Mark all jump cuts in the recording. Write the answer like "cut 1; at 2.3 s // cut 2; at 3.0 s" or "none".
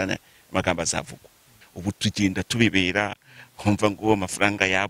cut 1; at 1.5 s